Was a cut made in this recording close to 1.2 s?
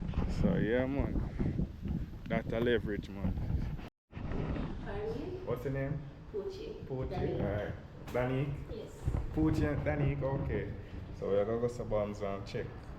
no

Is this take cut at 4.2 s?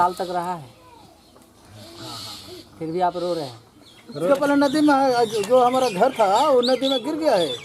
yes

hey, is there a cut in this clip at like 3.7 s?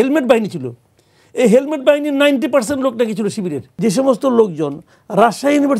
yes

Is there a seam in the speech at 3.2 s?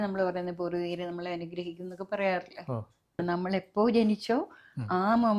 yes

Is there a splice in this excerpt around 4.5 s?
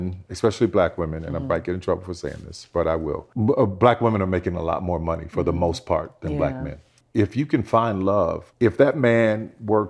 no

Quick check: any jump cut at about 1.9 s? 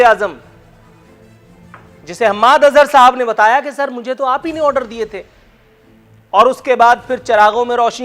no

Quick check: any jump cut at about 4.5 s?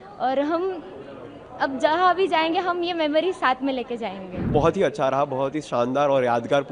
yes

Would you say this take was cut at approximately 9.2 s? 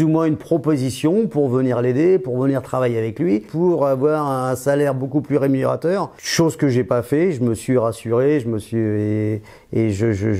no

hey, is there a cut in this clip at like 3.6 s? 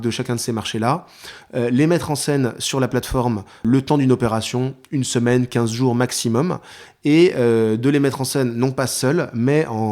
yes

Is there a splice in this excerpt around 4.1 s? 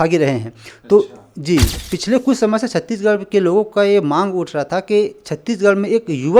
no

